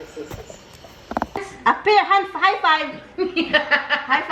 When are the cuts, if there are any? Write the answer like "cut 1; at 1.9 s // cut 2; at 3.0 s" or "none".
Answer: cut 1; at 1.5 s